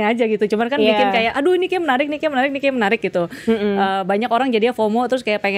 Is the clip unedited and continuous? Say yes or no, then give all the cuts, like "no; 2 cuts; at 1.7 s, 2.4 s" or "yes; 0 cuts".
yes; 0 cuts